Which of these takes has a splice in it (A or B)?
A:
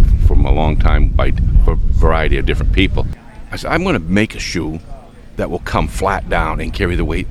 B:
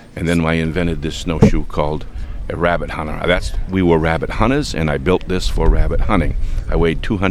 A